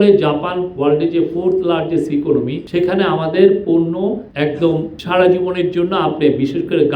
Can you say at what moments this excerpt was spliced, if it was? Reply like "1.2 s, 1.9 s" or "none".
2.6 s, 4.3 s, 5.0 s